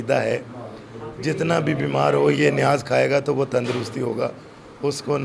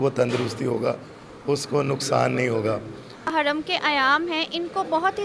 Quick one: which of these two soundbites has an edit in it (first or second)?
second